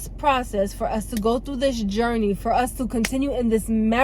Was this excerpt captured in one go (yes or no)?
yes